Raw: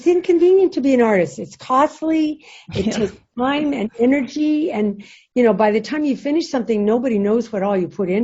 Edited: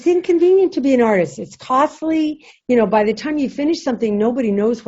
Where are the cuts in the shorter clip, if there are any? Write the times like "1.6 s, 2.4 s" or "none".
2.5 s